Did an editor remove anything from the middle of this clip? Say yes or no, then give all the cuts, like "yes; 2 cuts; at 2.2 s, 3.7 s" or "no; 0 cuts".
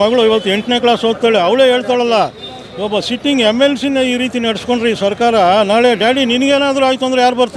no; 0 cuts